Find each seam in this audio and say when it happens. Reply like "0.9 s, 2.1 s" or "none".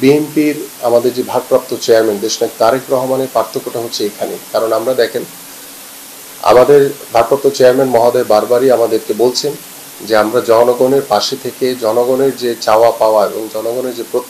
none

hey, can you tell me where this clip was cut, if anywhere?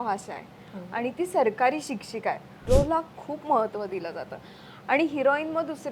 2.5 s

